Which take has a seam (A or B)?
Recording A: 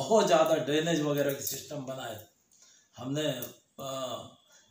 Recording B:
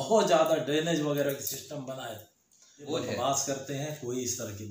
B